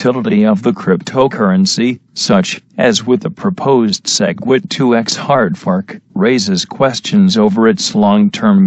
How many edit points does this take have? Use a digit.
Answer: 1